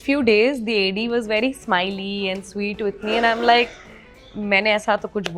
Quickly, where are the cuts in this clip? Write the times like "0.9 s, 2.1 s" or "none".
none